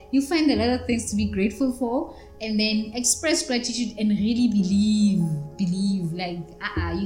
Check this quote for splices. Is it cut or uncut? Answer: uncut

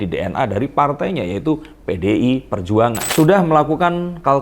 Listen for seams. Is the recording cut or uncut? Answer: cut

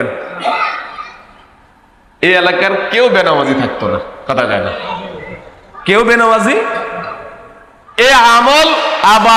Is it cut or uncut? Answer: uncut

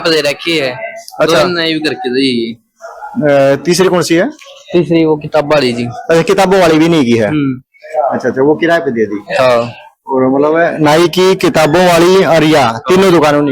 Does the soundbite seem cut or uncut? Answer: uncut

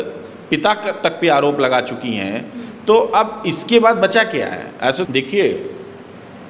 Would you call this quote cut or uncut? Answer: cut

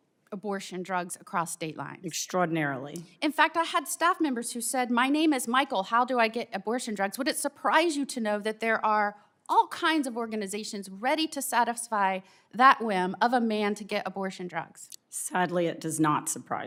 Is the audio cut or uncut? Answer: uncut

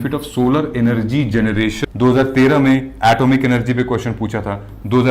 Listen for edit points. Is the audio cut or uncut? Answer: cut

